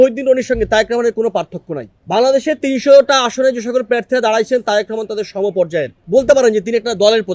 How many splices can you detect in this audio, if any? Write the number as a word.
two